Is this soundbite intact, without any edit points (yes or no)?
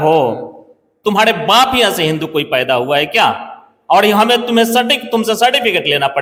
yes